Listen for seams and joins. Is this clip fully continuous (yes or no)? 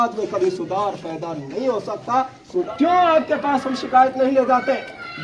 no